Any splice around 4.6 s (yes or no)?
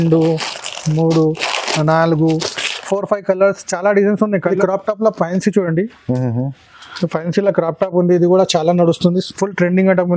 yes